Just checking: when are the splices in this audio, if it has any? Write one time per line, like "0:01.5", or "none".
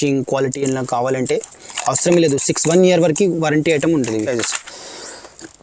0:04.3

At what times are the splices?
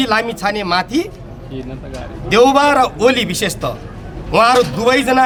none

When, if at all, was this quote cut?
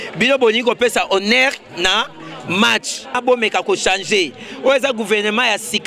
0:03.2

